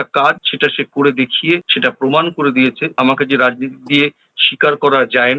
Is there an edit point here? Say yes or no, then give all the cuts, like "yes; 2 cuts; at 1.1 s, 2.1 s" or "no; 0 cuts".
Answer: yes; 2 cuts; at 1.7 s, 2.9 s